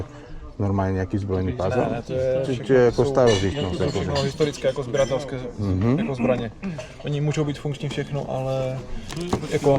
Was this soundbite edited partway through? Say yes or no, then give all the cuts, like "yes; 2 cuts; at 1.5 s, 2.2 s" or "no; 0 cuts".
no; 0 cuts